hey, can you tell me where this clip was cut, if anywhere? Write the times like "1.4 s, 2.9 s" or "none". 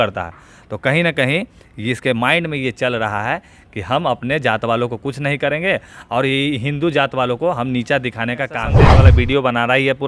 8.8 s